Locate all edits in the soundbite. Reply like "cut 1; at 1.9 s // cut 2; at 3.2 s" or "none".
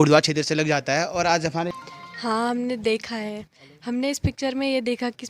cut 1; at 1.8 s